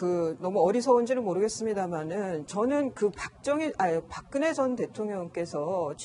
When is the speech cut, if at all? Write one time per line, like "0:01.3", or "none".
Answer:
none